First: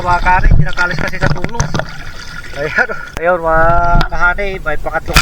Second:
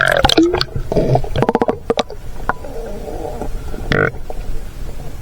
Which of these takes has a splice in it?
first; 1 cut; at 3.1 s

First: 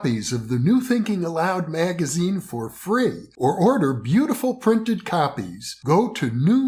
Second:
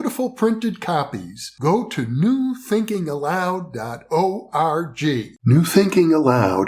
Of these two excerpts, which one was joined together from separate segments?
second; 1 cut; at 5.3 s

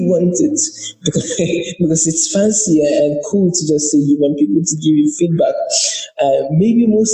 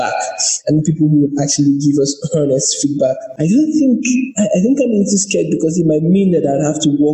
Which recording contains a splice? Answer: second; 1 cut; at 3.3 s

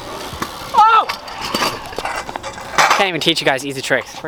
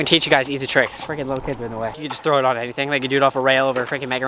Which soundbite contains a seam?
second; 1 cut; at 2.1 s

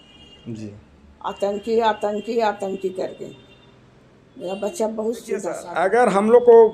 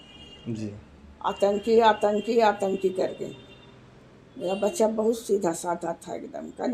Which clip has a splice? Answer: first; 1 cut; at 5.7 s

